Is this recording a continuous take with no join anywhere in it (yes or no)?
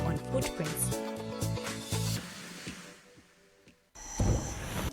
no